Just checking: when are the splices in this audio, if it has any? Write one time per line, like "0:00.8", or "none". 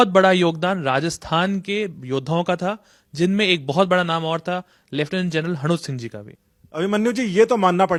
none

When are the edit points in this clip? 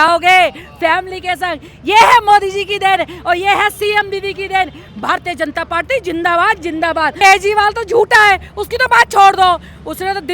0:07.1

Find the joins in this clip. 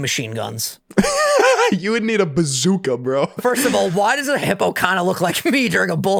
0:04.4

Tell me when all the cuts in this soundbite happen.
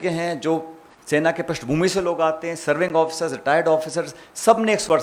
none

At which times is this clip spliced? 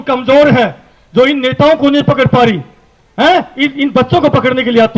none

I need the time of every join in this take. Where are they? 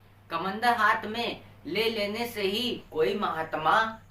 0:02.8

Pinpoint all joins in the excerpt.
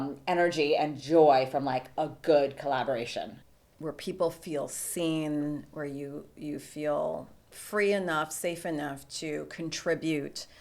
0:03.4

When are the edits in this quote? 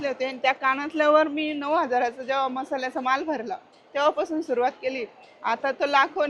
none

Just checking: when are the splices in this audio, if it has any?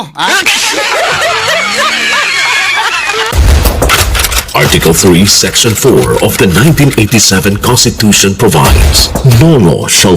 0:03.3

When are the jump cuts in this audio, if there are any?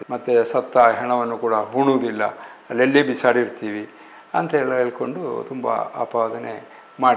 none

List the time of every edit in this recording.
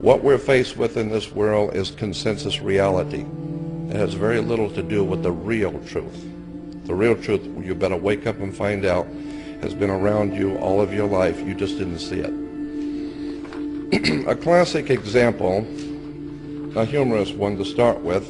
0:14.8

